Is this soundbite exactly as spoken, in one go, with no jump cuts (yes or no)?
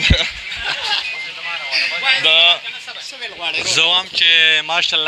no